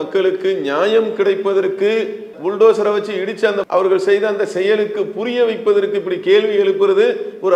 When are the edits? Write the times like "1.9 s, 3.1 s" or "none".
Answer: none